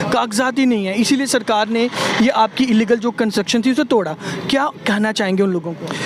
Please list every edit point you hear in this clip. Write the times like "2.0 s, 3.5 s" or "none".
none

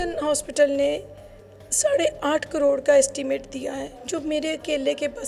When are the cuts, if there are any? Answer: none

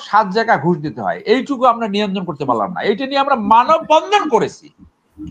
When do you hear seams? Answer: none

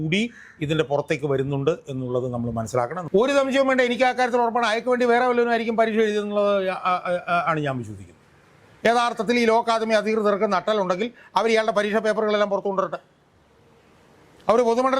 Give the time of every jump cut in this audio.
3.0 s

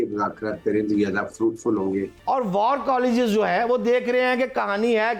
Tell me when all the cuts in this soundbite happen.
2.1 s

